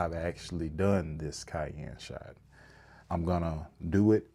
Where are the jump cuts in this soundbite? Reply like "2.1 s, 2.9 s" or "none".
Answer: none